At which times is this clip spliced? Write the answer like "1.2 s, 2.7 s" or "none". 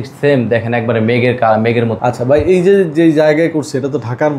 1.9 s